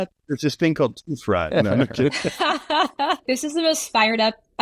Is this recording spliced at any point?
yes; 1 cut; at 2.3 s

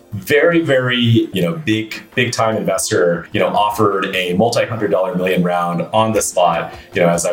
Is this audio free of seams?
no; 2 cuts; at 1.3 s, 3.3 s

